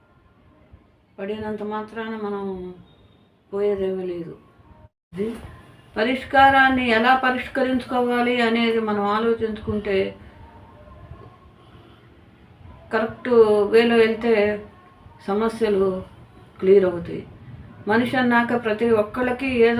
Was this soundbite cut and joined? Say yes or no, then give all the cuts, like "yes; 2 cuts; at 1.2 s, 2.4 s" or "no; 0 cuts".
yes; 1 cut; at 5.2 s